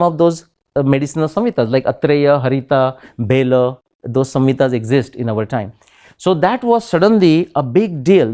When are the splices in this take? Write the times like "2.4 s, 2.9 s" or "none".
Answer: none